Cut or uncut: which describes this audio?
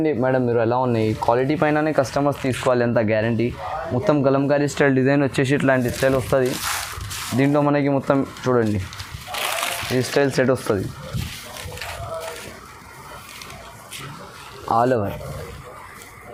uncut